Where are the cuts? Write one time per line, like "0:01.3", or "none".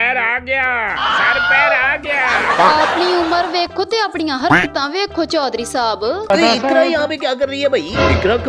0:02.6
0:06.3